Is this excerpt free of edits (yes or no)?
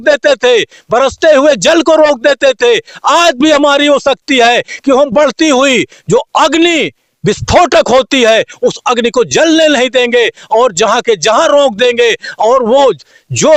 yes